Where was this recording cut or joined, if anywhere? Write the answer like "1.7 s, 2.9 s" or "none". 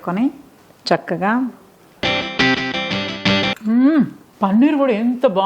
3.6 s, 4.2 s